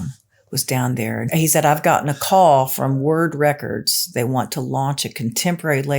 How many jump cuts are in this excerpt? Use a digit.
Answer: 2